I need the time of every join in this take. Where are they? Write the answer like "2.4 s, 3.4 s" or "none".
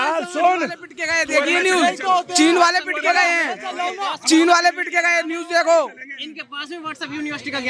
none